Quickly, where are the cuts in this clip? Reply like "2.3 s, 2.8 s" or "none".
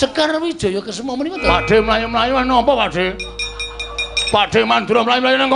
1.4 s